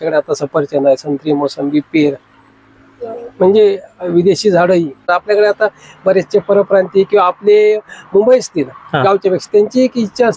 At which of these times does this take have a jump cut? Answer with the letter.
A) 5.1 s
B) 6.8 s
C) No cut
A